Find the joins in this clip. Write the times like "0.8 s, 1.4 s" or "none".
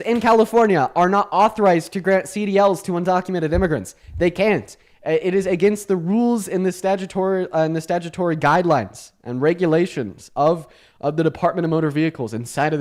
none